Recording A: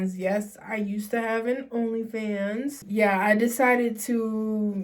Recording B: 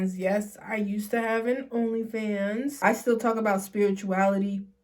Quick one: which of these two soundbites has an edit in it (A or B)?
B